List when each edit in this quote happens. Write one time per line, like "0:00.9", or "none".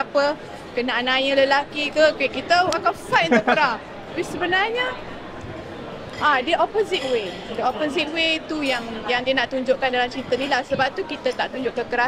none